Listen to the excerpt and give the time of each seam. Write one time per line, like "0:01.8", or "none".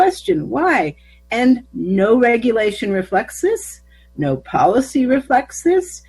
0:01.7

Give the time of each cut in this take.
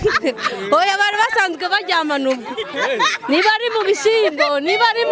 none

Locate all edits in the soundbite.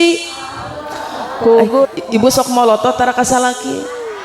0:01.8

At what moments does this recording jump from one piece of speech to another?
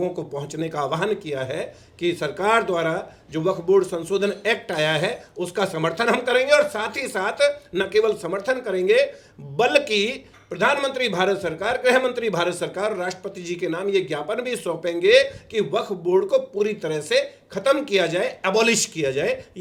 none

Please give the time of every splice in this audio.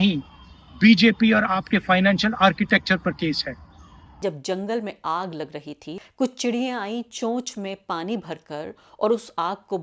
0:04.2
0:05.9

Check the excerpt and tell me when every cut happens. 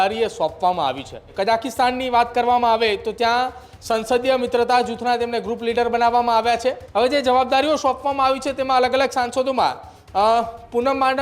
0:01.2
0:06.8

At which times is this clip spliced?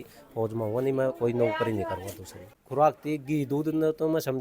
0:02.6

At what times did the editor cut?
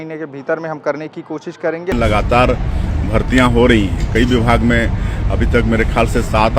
0:01.9

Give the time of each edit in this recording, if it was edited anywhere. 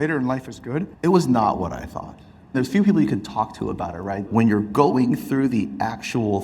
0:00.9
0:02.5
0:04.2

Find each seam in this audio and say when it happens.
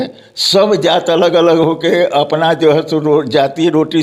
none

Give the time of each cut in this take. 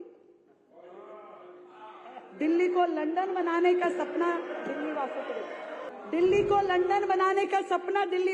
0:05.9

